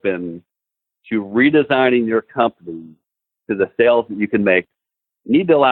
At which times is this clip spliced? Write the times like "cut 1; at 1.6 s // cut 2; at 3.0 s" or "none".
cut 1; at 4.6 s